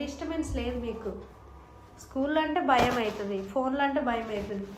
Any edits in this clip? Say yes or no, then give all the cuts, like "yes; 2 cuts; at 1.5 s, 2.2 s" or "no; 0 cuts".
no; 0 cuts